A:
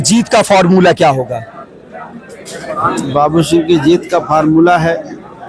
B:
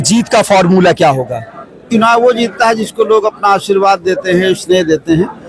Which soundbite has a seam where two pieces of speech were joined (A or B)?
B